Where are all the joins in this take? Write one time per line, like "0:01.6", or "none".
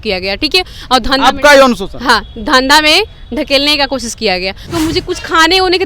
0:04.7